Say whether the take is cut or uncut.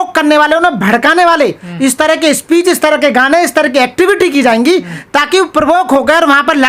uncut